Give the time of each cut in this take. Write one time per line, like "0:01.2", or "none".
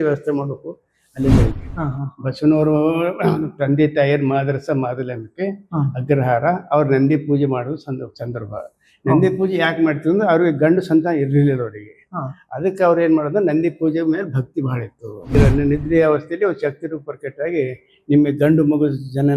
0:01.5
0:15.3